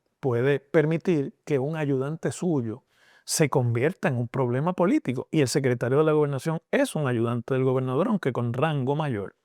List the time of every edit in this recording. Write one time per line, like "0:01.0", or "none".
none